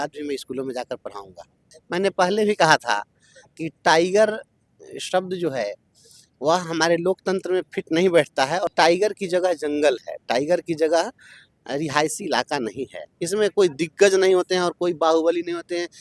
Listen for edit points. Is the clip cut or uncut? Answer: cut